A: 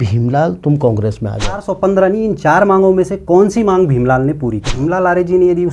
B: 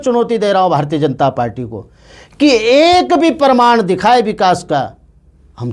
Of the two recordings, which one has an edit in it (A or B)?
A